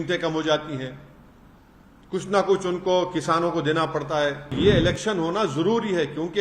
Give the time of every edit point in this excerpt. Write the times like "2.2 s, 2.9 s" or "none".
4.5 s